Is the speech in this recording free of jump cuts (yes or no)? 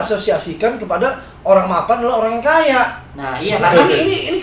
yes